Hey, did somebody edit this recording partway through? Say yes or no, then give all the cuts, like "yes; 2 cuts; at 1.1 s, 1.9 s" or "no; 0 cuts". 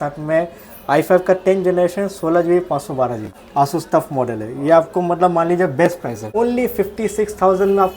yes; 2 cuts; at 3.3 s, 6.2 s